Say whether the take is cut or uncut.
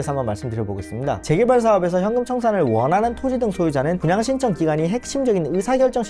cut